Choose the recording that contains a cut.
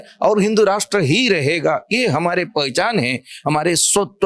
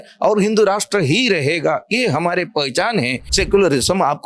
second; 1 cut; at 3.2 s

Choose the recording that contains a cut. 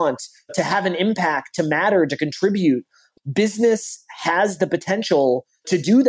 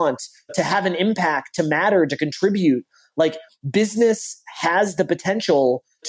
first; 1 cut; at 3.0 s

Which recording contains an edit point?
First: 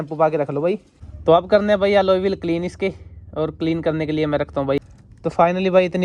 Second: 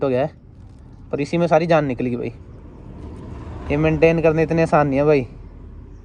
first; 2 cuts; at 1.0 s, 5.0 s

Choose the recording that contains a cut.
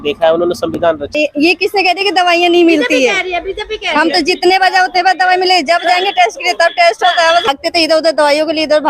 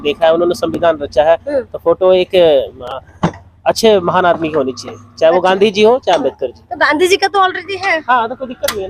first; 2 cuts; at 1.1 s, 7.5 s

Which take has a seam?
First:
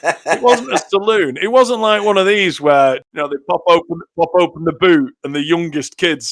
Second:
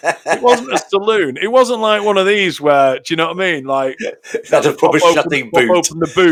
first; 1 cut; at 3.2 s

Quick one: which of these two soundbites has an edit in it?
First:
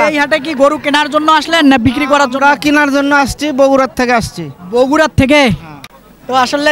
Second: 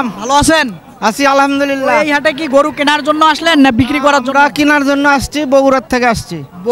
first; 1 cut; at 5.7 s

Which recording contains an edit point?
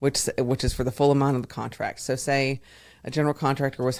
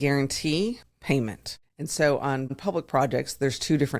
second; 2 cuts; at 1.0 s, 2.6 s

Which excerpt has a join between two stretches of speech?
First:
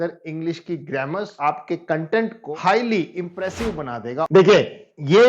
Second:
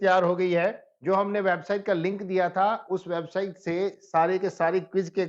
first; 3 cuts; at 1.3 s, 2.4 s, 4.3 s

